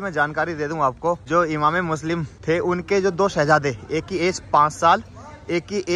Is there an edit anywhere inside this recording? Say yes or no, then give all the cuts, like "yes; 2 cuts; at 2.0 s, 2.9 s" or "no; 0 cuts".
yes; 2 cuts; at 1.2 s, 2.3 s